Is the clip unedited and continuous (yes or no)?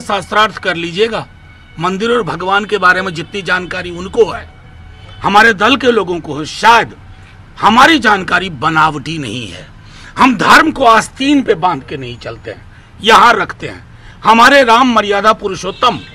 yes